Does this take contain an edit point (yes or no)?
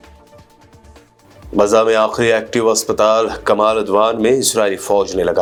no